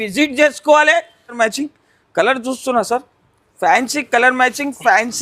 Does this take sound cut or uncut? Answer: cut